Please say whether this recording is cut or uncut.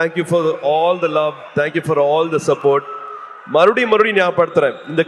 uncut